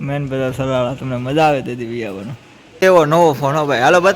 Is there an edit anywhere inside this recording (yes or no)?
yes